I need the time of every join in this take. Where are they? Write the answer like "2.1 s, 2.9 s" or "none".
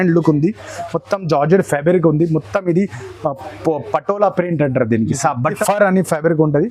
5.6 s